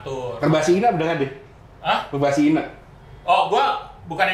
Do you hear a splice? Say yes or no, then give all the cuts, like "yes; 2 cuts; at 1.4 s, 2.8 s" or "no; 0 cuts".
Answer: no; 0 cuts